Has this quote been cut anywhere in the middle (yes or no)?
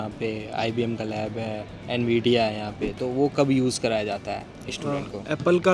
no